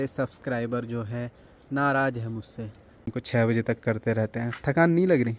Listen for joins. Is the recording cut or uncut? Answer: cut